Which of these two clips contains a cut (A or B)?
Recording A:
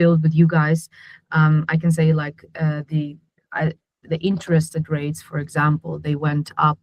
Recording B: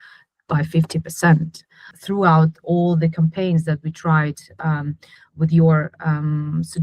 B